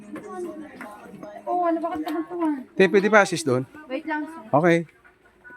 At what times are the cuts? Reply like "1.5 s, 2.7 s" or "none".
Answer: none